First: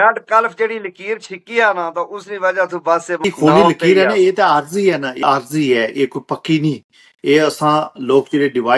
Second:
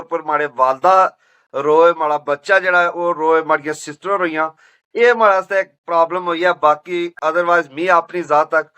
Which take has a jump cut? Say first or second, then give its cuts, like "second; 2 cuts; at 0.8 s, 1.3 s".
first; 2 cuts; at 3.2 s, 5.2 s